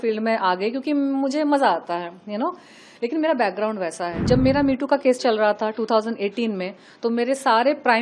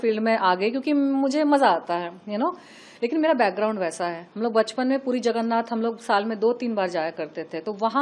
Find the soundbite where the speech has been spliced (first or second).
first